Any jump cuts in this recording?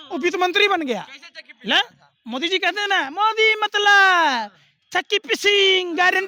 no; 0 cuts

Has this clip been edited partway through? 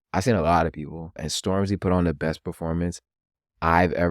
yes; 1 cut; at 1.3 s

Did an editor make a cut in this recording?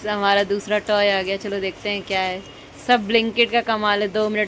no; 0 cuts

